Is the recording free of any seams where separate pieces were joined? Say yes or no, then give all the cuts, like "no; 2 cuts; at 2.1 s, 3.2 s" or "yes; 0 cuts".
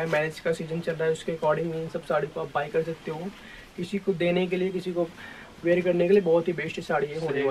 yes; 0 cuts